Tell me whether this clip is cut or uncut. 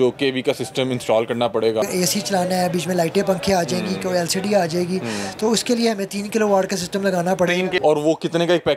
cut